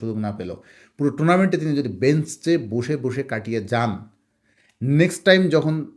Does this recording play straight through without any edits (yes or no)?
yes